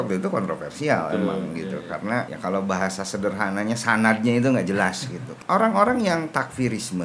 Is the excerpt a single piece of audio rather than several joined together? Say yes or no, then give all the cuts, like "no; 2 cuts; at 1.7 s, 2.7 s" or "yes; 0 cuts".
no; 2 cuts; at 2.3 s, 5.2 s